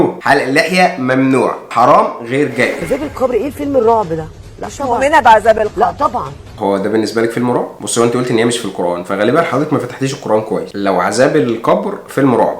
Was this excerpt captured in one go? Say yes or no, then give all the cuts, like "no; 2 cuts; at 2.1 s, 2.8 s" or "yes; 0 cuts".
no; 2 cuts; at 2.8 s, 6.6 s